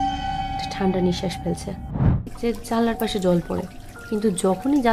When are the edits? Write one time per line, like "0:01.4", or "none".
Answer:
0:02.3